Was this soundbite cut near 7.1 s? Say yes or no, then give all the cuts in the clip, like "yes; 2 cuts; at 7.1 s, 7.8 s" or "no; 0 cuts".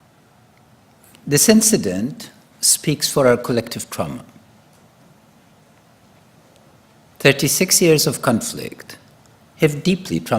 no; 1 cut; at 2.9 s